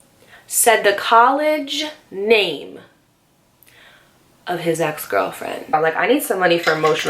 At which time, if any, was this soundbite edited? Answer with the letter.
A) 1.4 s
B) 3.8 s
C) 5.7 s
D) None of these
C